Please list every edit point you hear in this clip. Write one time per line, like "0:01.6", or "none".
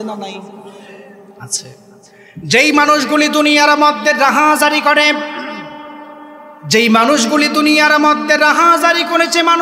0:02.2

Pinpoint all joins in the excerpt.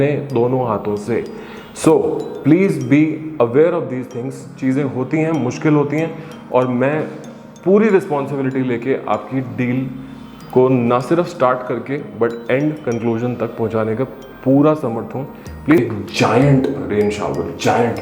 0:15.8

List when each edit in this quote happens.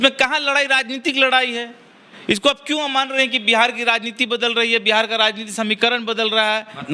none

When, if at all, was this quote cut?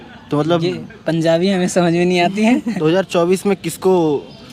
0:02.8

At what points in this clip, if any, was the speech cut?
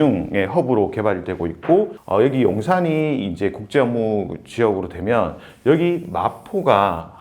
0:02.0

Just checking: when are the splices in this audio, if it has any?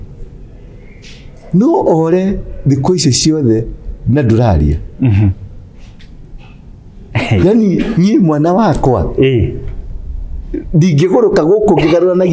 none

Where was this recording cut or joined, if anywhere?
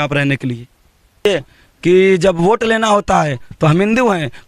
0:01.3

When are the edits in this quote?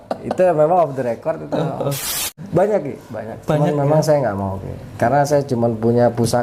0:02.3

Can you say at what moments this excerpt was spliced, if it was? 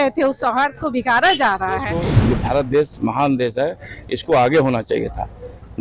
0:02.0

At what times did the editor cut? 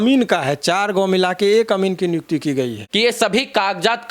0:02.8

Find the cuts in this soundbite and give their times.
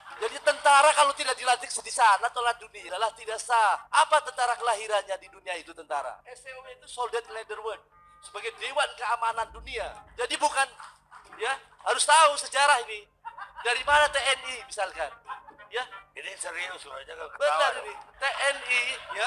0:02.9

